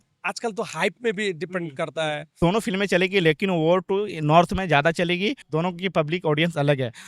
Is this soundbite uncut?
no; 2 cuts; at 2.3 s, 5.4 s

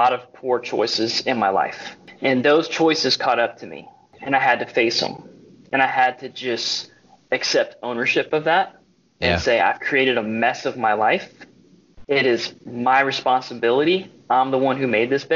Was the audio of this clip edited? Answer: yes; 2 cuts; at 2.0 s, 4.1 s

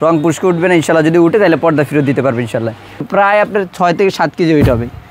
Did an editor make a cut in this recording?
yes; 1 cut; at 3.0 s

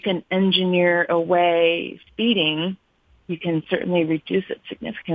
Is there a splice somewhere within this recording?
no; 0 cuts

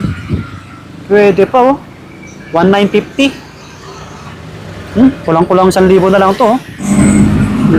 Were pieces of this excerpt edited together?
yes; 1 cut; at 6.9 s

